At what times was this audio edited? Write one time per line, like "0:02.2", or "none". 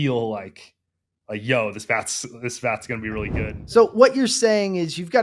0:03.5